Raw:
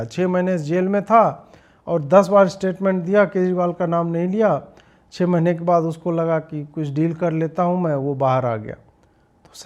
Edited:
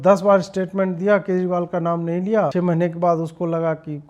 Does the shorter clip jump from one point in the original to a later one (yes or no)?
yes